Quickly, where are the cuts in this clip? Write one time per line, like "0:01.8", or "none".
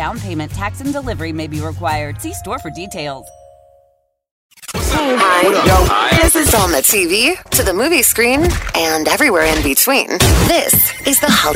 0:04.5